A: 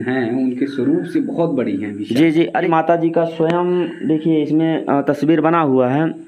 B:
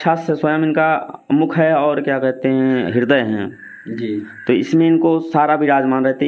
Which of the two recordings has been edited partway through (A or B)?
A